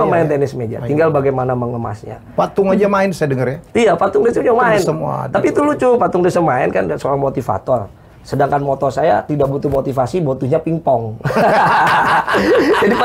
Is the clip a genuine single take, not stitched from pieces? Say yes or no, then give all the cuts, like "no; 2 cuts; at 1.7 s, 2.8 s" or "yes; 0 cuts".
yes; 0 cuts